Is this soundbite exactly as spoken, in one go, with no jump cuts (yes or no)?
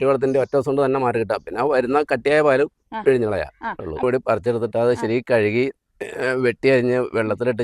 no